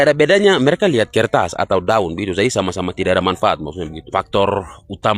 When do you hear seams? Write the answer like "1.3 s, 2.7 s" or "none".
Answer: 3.9 s